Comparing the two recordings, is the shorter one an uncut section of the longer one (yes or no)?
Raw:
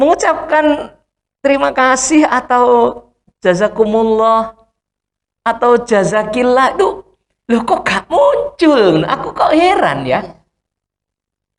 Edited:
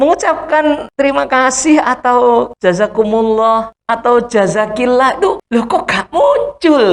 no